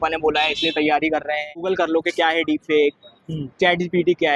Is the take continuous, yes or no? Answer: no